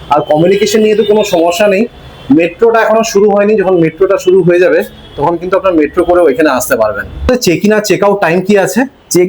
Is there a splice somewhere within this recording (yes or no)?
yes